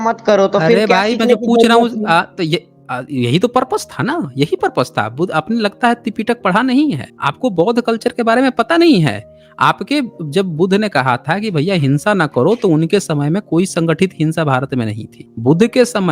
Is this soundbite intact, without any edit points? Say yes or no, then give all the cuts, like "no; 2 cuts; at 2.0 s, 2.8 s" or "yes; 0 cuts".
yes; 0 cuts